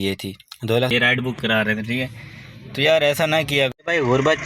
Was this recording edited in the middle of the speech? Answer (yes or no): yes